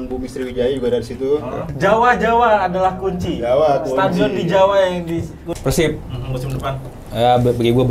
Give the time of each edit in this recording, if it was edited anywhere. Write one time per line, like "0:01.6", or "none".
0:01.6
0:05.5